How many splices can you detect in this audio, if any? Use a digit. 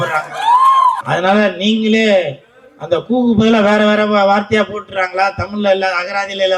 1